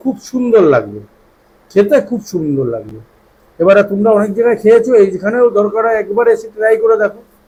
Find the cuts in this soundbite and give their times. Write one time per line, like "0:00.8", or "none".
none